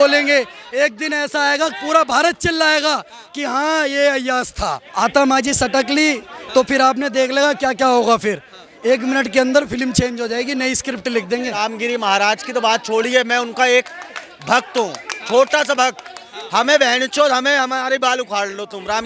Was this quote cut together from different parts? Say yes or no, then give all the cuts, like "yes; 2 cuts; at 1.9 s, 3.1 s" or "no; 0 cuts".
yes; 2 cuts; at 4.9 s, 11.6 s